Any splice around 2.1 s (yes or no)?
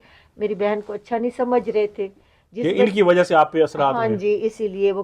no